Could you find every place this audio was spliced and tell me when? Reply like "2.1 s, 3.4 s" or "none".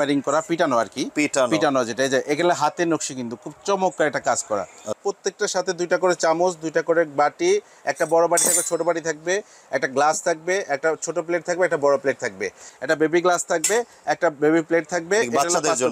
4.9 s, 12.7 s